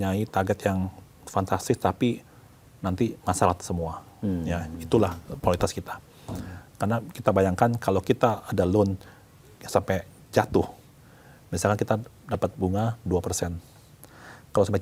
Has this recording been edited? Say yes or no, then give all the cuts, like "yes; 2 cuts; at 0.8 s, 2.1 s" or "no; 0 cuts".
no; 0 cuts